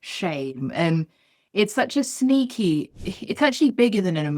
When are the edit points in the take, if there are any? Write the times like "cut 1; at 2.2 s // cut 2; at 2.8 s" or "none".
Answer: cut 1; at 2.9 s